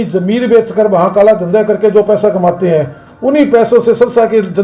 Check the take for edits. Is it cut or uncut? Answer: uncut